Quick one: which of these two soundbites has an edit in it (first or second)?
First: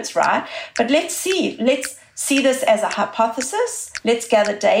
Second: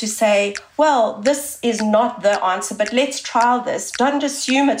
first